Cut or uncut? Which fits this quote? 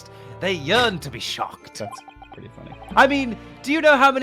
cut